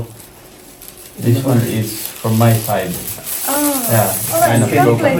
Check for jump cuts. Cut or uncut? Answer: uncut